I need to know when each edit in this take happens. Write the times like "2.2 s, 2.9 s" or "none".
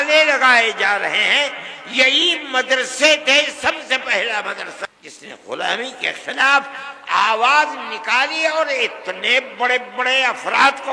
4.9 s